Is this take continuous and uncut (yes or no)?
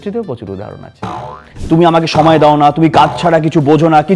no